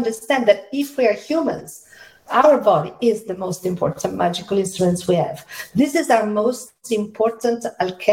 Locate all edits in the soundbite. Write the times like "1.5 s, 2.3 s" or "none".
2.2 s